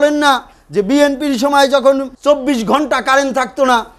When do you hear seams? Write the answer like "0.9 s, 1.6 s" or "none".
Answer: 2.1 s